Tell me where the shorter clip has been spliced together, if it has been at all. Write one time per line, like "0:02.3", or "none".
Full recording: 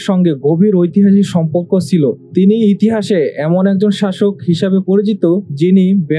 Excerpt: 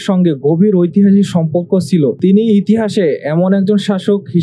0:02.2